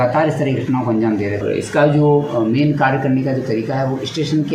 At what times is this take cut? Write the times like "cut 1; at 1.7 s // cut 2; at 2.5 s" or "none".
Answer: cut 1; at 1.4 s